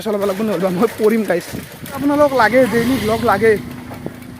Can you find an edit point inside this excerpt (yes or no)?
yes